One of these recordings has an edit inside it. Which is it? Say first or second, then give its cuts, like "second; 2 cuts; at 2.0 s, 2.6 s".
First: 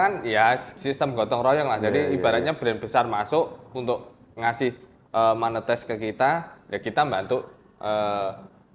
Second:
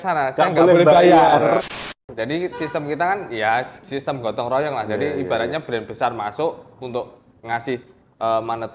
second; 1 cut; at 1.6 s